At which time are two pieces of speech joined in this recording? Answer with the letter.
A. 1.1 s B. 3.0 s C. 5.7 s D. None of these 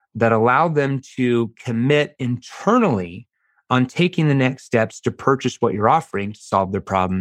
D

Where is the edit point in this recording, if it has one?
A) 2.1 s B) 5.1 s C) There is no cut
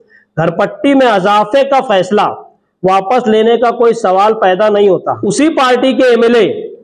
B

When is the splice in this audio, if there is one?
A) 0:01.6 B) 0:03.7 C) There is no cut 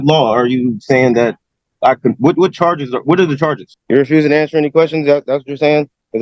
B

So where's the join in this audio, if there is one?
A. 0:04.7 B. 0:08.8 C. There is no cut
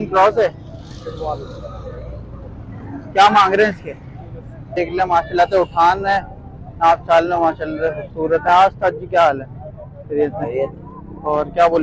A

